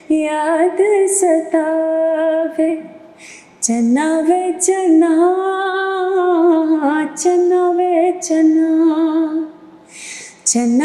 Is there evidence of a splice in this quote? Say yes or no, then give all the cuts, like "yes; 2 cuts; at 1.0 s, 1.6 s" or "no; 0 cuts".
no; 0 cuts